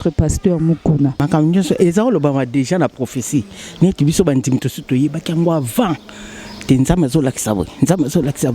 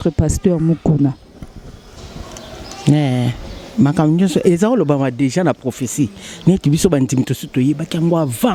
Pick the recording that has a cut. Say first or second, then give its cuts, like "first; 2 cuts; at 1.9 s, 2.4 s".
first; 1 cut; at 1.2 s